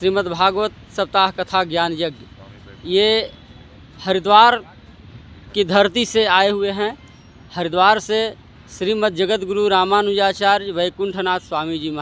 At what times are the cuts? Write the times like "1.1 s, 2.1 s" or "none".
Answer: none

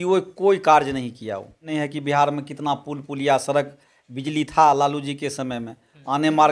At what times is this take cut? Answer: 1.7 s

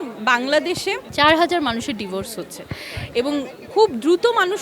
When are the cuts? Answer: 1.0 s

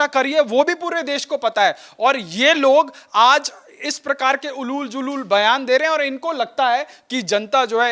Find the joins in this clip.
none

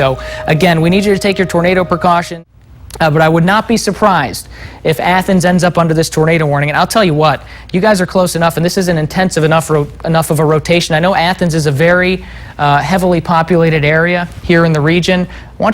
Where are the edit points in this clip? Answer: 2.3 s

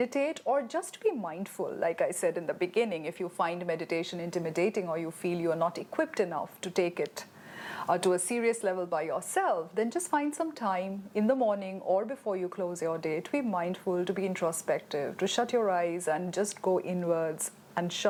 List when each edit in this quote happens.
none

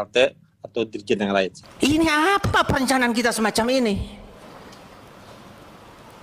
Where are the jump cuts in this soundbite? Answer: 1.6 s

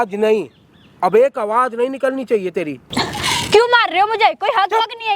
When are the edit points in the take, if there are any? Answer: 2.9 s

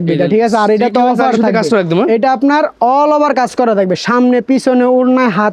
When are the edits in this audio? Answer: none

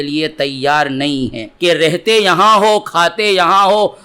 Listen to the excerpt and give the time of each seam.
1.5 s

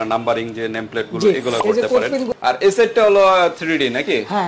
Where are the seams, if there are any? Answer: 2.3 s

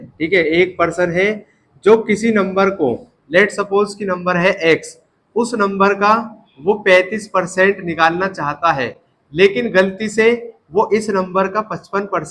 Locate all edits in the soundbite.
none

